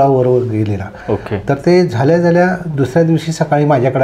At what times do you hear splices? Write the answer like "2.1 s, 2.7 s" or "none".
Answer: none